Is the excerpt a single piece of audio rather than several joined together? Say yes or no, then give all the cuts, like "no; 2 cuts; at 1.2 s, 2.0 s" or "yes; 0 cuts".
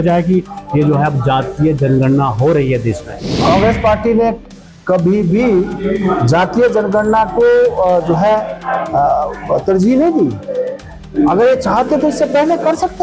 no; 1 cut; at 3.3 s